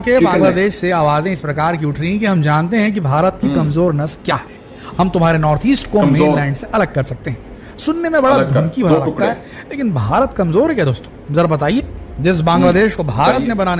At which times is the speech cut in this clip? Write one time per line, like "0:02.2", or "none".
none